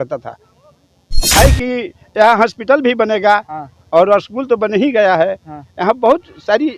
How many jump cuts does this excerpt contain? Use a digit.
1